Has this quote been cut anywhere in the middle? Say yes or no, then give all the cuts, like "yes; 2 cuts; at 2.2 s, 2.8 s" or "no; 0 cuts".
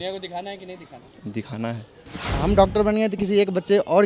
yes; 1 cut; at 2.2 s